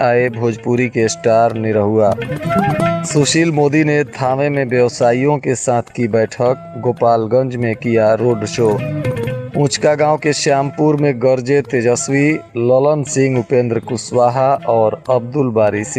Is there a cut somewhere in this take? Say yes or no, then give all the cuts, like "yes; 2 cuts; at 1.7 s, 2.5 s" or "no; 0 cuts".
no; 0 cuts